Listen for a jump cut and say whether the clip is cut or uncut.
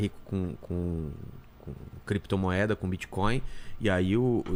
uncut